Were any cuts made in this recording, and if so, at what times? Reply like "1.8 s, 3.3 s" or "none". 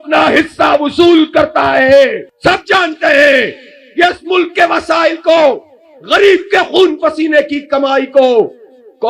2.3 s